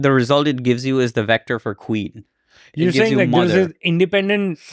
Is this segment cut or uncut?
cut